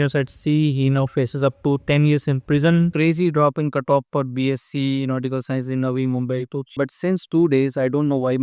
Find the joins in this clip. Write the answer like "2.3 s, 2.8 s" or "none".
2.9 s, 6.8 s